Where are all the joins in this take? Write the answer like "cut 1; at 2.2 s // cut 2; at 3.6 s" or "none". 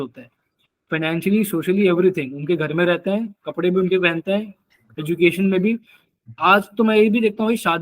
none

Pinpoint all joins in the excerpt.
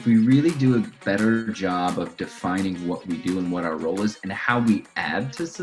cut 1; at 1.0 s

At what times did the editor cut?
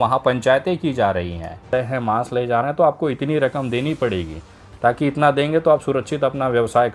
cut 1; at 1.7 s

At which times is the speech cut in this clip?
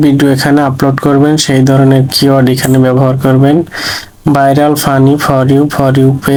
none

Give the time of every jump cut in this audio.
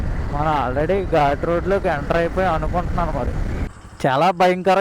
cut 1; at 3.6 s

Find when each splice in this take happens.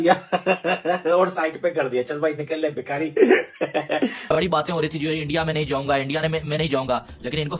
cut 1; at 4.2 s

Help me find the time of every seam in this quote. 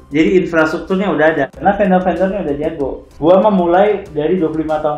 cut 1; at 1.6 s // cut 2; at 3.0 s

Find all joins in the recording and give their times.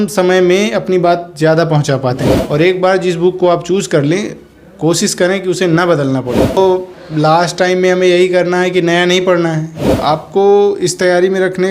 cut 1; at 2.3 s // cut 2; at 6.6 s // cut 3; at 9.8 s

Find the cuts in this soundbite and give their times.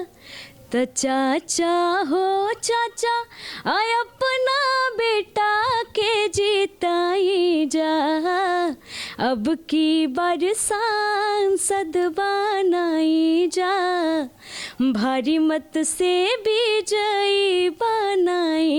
none

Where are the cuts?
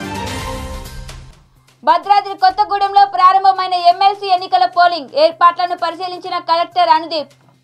cut 1; at 1.2 s

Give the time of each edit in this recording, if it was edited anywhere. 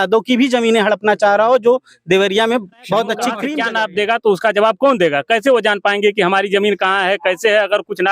cut 1; at 3.5 s

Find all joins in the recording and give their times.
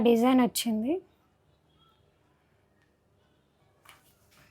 none

